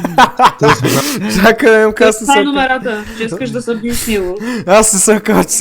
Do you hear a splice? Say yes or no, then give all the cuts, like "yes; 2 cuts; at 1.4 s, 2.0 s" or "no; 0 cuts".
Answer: yes; 1 cut; at 1.0 s